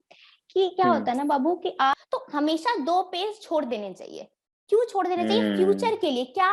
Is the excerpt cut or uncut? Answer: cut